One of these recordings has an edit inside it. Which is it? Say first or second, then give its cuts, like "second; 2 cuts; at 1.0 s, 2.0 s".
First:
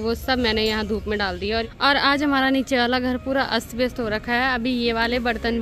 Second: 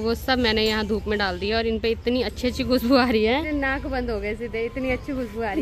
first; 1 cut; at 1.6 s